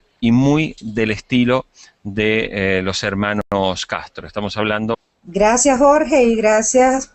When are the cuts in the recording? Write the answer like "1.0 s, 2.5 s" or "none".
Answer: none